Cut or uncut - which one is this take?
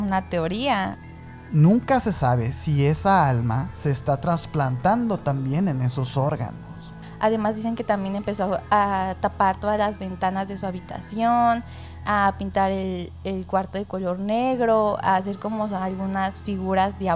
cut